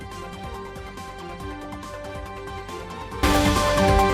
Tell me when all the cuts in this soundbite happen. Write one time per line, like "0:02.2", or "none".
none